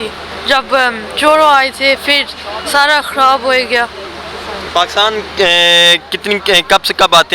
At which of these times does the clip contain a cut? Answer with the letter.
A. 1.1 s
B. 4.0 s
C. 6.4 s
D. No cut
D